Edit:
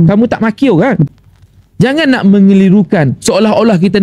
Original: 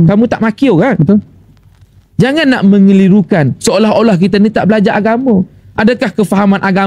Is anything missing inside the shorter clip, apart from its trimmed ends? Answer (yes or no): yes